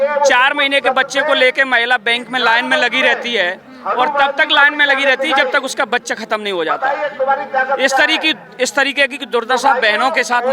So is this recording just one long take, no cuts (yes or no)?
yes